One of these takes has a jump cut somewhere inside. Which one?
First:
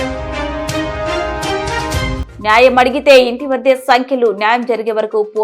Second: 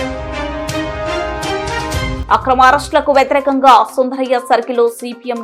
first; 1 cut; at 2.2 s

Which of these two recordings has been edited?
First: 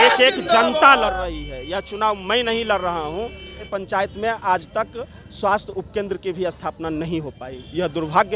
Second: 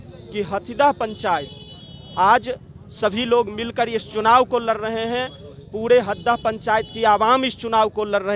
first; 1 cut; at 3.7 s

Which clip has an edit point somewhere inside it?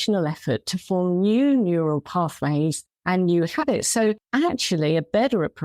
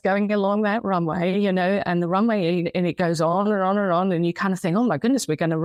first; 2 cuts; at 2.9 s, 4.2 s

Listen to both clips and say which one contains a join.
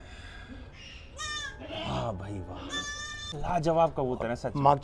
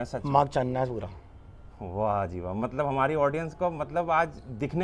first; 1 cut; at 3.4 s

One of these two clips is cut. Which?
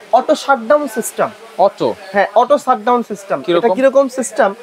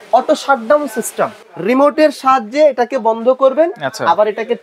second; 1 cut; at 1.4 s

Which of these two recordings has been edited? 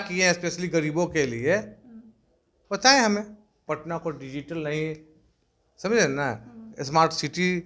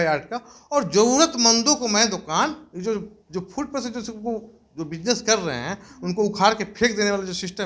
first; 1 cut; at 3.6 s

